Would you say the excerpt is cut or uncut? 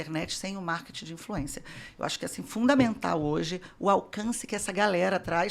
uncut